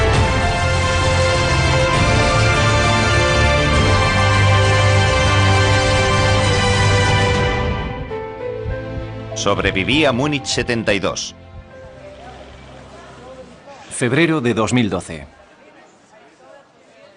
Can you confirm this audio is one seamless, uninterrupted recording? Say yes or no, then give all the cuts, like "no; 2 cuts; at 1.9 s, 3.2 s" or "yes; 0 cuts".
no; 1 cut; at 6.8 s